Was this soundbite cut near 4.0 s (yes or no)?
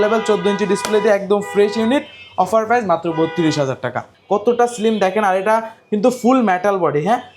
yes